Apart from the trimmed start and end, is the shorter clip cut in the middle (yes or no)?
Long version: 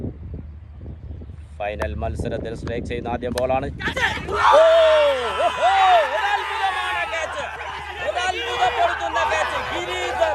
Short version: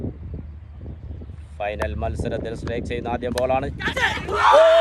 no